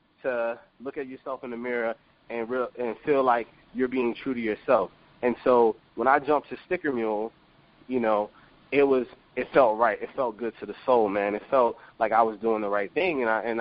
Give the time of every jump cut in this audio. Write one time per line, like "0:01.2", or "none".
none